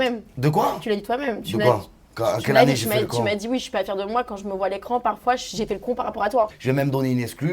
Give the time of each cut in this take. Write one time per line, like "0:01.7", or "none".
0:06.6